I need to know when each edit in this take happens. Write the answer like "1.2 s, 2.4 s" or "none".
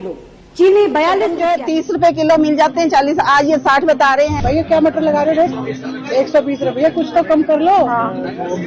1.6 s, 4.3 s